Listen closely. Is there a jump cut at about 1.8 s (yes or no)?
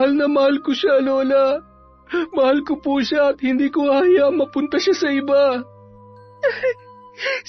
no